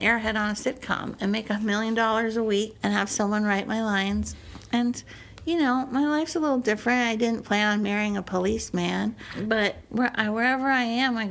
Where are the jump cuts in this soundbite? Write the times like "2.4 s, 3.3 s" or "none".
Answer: 1.6 s, 2.7 s, 9.5 s

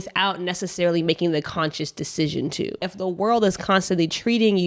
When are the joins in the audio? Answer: 2.9 s

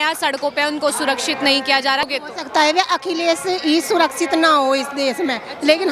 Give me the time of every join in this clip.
2.1 s

